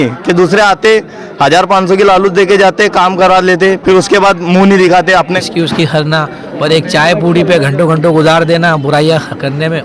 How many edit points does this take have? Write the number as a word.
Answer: one